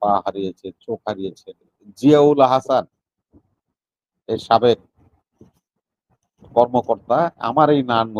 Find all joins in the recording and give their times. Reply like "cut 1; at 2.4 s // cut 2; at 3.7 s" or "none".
cut 1; at 1.8 s

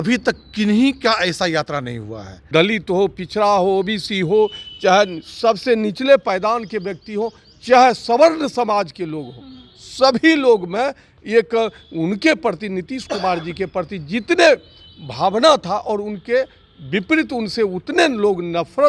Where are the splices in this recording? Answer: cut 1; at 2.3 s

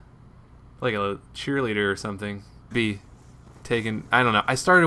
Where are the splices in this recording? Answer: none

